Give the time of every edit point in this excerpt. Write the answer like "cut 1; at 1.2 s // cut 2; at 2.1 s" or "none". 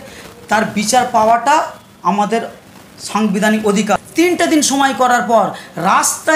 cut 1; at 4.0 s